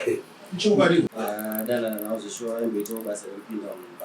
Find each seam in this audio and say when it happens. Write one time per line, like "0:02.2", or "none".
0:01.1